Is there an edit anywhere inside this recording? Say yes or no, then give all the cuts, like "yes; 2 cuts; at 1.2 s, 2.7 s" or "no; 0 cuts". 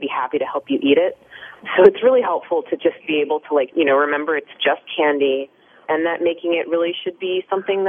yes; 1 cut; at 3.7 s